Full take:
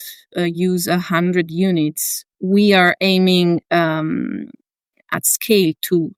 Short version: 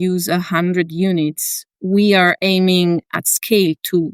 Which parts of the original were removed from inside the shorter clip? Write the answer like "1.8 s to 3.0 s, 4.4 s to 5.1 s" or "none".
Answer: 3.6 s to 5.0 s